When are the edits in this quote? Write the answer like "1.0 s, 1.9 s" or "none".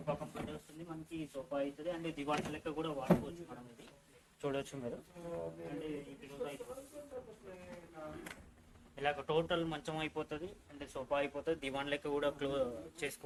none